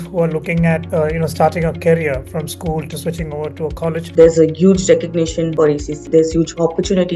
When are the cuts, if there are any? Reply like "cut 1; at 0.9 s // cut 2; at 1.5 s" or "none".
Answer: cut 1; at 0.8 s // cut 2; at 4.1 s // cut 3; at 5.7 s